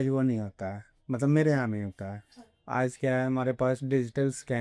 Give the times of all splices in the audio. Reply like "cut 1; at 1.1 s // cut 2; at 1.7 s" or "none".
none